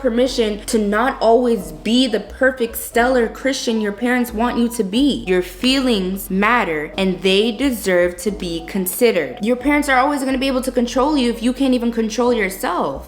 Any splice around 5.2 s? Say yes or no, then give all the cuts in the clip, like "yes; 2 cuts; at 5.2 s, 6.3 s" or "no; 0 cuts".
yes; 2 cuts; at 5.2 s, 9.4 s